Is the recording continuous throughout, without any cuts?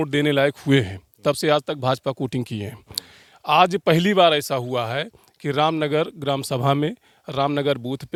yes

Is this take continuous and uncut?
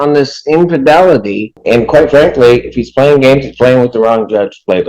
no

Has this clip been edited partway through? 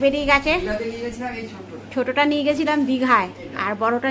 no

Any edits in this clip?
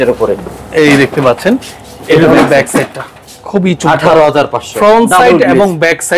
no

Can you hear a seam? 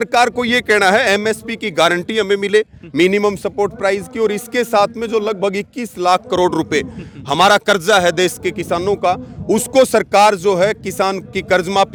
no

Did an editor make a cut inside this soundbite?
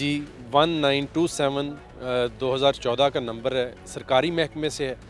no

